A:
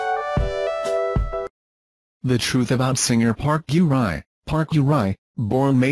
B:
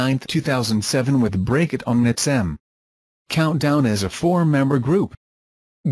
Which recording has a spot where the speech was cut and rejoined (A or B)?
B